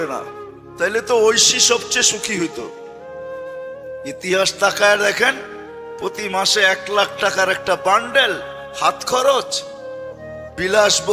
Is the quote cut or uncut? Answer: uncut